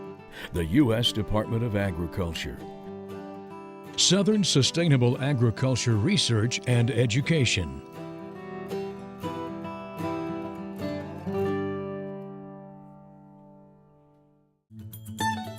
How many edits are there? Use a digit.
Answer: 2